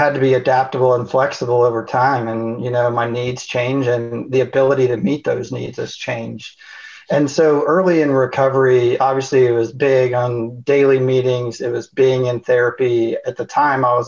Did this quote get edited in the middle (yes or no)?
no